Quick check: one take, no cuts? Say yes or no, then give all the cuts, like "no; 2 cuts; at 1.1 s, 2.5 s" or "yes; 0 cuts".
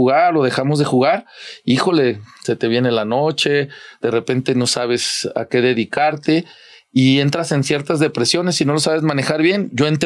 yes; 0 cuts